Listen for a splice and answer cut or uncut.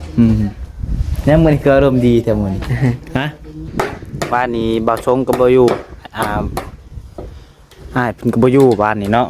cut